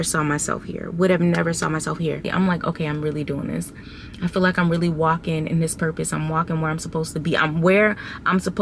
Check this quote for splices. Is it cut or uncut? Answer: cut